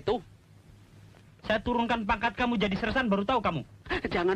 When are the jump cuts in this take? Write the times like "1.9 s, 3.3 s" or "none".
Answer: 1.3 s